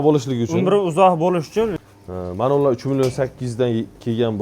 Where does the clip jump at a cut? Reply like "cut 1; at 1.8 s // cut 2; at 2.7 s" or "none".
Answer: cut 1; at 1.7 s